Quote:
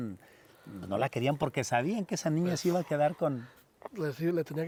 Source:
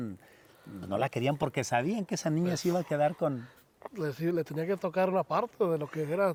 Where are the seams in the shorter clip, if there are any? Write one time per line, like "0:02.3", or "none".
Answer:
none